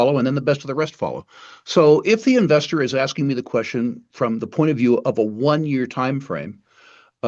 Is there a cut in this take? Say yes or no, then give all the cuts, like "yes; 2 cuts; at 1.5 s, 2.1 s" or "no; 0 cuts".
no; 0 cuts